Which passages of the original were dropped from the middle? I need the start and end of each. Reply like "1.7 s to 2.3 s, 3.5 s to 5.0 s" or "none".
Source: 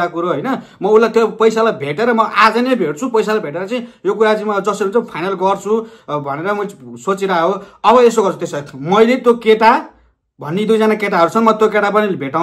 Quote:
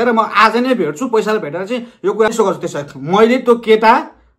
4.3 s to 8.1 s